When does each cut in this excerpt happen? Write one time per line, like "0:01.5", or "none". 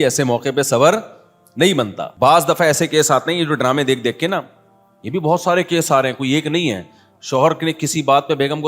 0:02.0